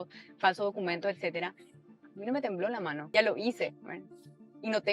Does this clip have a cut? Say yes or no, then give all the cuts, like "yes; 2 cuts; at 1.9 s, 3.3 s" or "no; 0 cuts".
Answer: yes; 1 cut; at 3.0 s